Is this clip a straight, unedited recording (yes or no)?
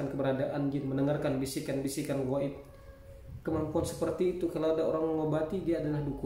yes